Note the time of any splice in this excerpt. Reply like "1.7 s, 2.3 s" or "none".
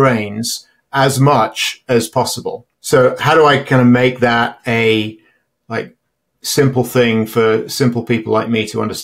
2.7 s

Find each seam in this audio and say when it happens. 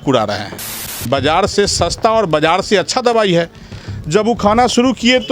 0.9 s

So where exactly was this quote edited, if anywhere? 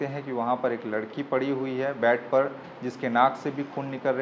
none

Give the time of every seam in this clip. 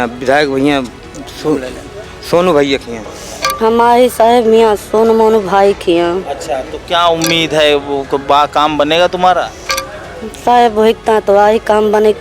2.9 s

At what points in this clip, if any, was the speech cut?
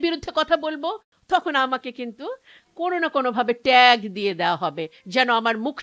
1.1 s

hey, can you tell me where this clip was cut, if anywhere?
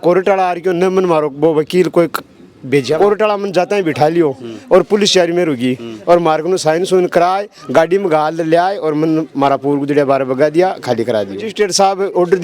2.9 s, 11.5 s

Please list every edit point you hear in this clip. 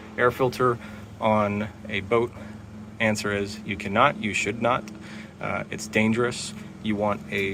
none

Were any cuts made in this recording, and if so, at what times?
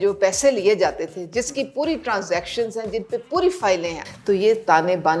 3.9 s

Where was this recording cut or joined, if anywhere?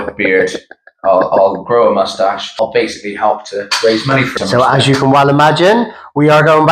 2.5 s, 4.3 s

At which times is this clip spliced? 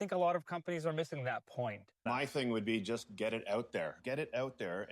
1.9 s, 4.0 s

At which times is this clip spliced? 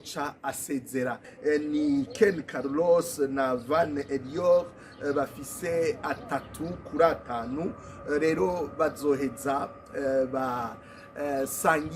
1.3 s

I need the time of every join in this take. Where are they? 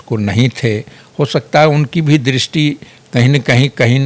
none

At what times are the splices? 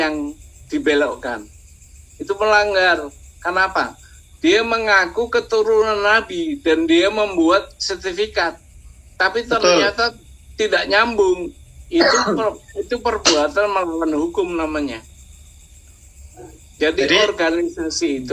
none

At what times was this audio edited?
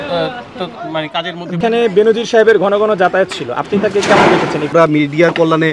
1.6 s, 4.7 s

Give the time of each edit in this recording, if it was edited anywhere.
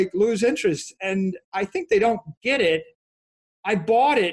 none

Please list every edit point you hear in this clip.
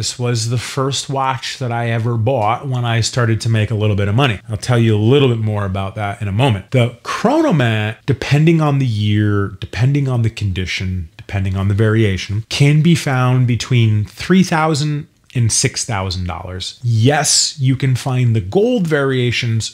none

